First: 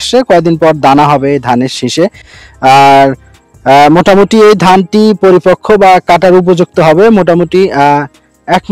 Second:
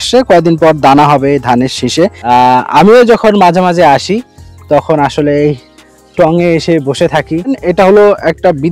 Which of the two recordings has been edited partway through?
second; 2 cuts; at 2.2 s, 7.5 s

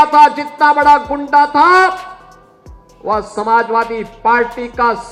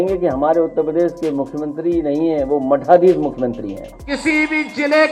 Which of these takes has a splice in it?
second; 1 cut; at 3.9 s

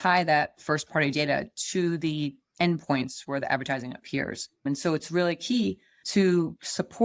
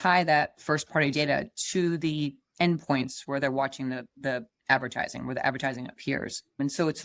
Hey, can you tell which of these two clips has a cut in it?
first; 1 cut; at 3.4 s

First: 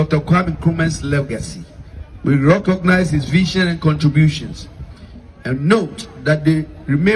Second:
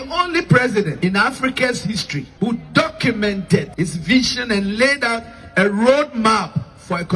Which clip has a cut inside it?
second; 3 cuts; at 0.9 s, 2.2 s, 3.7 s

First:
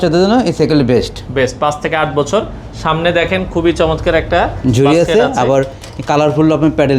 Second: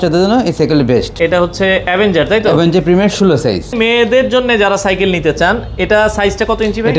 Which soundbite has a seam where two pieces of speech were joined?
second; 2 cuts; at 1.1 s, 3.7 s

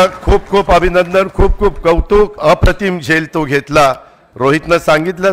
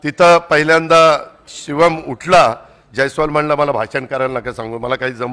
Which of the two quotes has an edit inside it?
first; 1 cut; at 2.4 s

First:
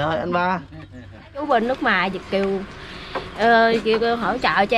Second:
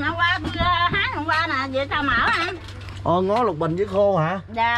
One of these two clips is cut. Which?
first; 1 cut; at 1.4 s

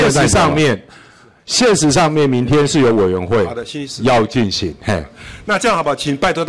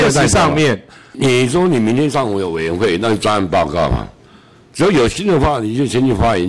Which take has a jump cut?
second; 1 cut; at 1.1 s

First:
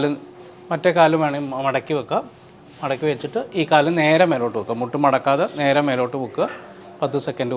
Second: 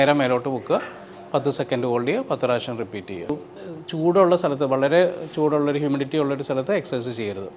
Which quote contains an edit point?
second; 1 cut; at 3.3 s

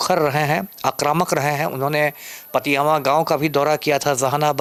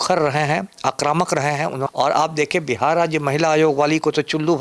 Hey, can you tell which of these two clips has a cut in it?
second; 1 cut; at 1.9 s

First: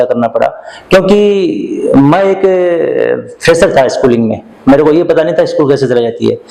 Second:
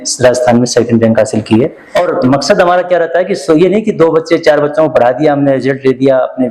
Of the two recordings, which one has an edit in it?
second; 1 cut; at 1.8 s

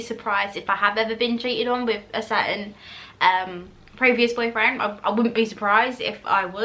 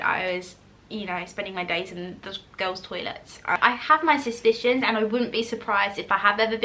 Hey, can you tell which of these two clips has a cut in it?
second; 1 cut; at 3.6 s

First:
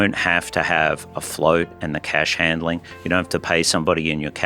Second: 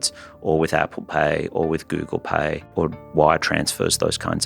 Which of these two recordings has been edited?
second; 1 cut; at 3.0 s

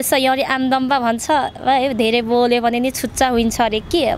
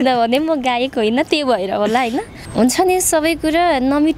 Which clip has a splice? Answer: second; 1 cut; at 2.4 s

